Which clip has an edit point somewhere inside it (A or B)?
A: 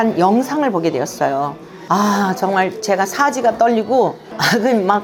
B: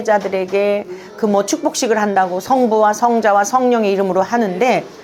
A